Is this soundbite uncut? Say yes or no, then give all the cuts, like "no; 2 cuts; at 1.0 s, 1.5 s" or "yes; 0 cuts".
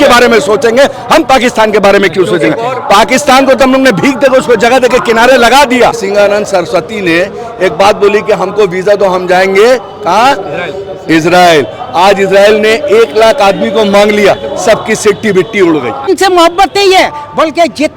no; 2 cuts; at 6.0 s, 16.1 s